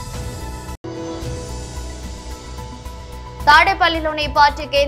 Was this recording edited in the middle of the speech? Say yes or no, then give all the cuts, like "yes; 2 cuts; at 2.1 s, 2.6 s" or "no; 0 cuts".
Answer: no; 0 cuts